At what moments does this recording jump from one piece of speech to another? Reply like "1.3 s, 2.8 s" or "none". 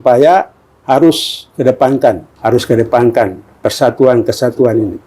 2.3 s